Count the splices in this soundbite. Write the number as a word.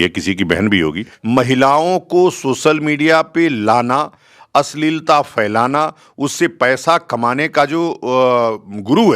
one